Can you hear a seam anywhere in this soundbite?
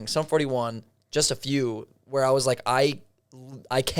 no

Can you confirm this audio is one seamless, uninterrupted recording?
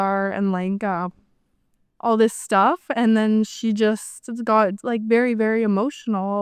yes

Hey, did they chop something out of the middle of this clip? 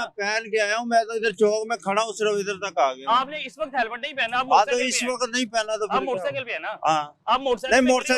no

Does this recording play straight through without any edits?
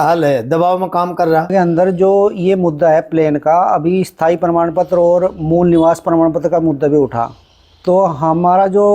no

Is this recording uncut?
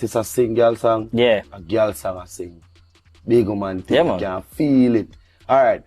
yes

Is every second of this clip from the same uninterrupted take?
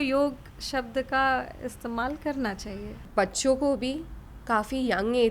no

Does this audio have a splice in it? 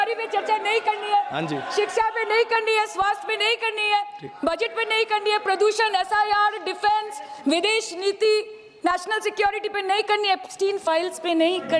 no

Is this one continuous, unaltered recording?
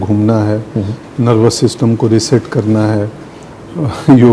yes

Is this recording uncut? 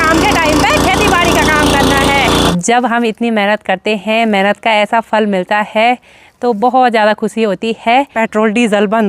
no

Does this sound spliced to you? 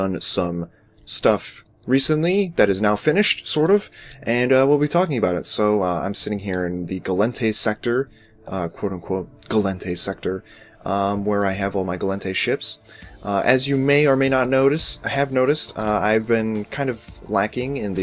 no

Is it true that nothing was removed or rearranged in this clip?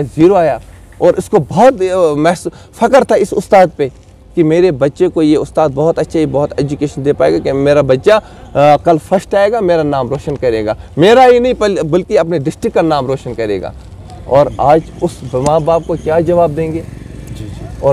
yes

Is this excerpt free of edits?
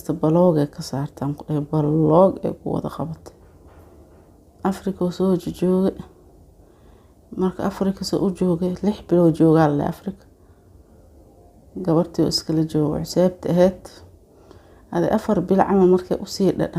yes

